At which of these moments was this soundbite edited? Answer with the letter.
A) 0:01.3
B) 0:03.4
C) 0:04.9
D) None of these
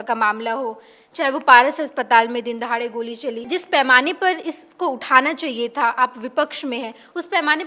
B